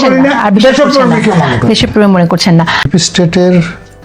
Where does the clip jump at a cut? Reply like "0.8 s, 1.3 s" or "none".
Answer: 2.9 s